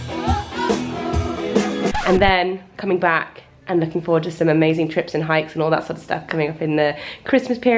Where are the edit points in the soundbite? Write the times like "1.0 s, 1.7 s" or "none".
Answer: none